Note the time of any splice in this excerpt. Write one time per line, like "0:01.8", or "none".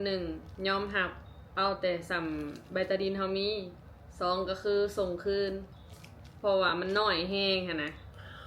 none